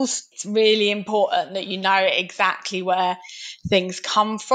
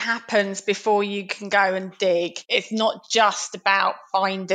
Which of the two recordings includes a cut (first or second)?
second